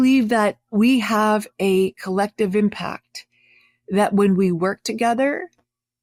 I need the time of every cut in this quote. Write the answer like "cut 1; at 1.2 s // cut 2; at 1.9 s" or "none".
none